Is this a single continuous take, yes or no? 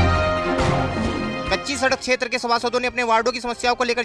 no